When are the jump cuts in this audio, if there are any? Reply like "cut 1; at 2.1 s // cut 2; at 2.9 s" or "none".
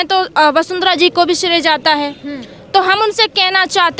none